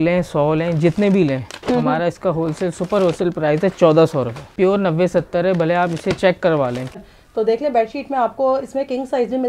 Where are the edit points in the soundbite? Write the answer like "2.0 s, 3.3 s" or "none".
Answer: 4.5 s, 7.0 s